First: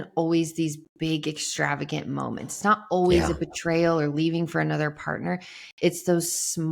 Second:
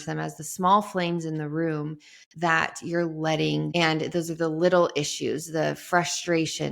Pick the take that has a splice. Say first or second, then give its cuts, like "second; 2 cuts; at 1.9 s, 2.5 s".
second; 1 cut; at 3.7 s